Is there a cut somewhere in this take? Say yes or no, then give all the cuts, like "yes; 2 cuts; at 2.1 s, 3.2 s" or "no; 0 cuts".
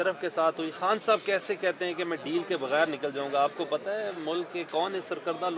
no; 0 cuts